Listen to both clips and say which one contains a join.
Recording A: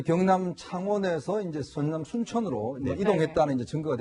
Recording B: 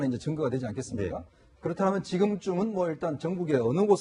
A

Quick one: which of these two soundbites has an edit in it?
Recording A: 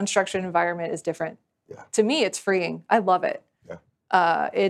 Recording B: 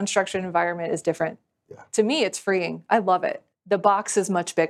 B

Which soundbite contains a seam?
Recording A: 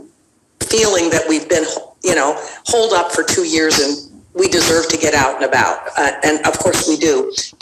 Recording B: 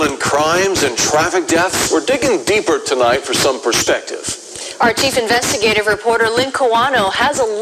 B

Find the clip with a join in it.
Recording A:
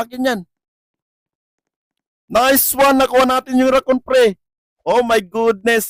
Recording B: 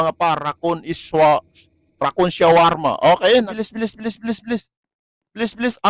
B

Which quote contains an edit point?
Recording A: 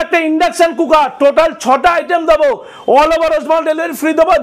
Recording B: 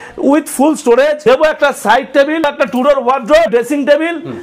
B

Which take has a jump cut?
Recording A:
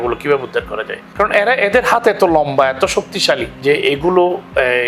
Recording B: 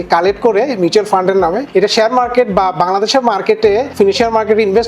B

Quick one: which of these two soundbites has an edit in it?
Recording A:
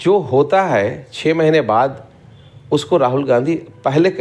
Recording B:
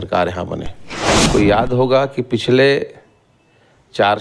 B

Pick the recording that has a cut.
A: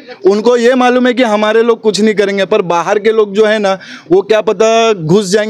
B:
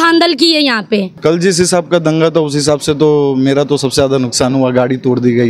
B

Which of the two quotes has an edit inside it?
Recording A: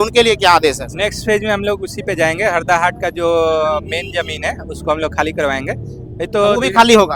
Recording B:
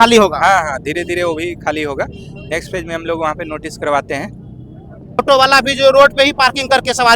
B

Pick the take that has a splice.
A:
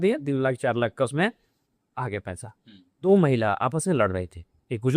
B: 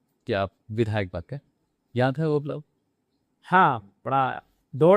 A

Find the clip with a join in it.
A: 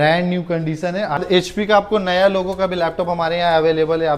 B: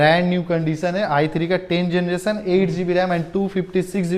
A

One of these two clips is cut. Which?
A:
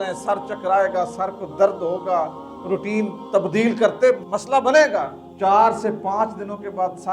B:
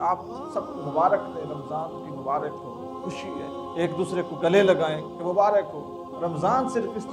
A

